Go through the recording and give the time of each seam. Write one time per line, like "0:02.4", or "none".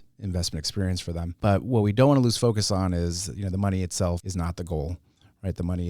0:01.4
0:04.2